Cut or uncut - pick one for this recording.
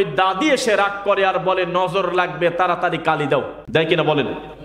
cut